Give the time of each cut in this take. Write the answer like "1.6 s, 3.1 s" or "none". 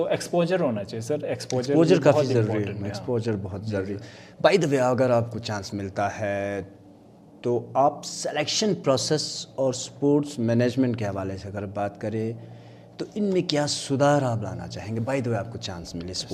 none